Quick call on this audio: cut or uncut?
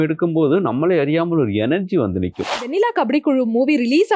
cut